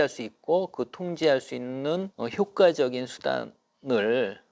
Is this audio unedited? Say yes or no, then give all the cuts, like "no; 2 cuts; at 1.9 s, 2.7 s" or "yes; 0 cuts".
no; 1 cut; at 2.1 s